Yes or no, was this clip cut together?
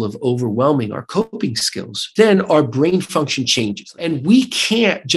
yes